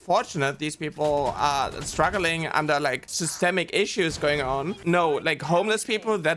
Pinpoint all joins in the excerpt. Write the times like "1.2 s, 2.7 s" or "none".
3.2 s, 4.8 s